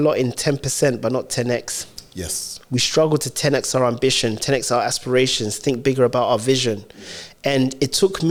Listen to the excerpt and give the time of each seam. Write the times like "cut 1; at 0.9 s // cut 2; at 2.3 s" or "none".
none